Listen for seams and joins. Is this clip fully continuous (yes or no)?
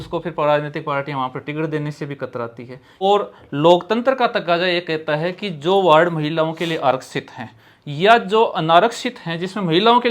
no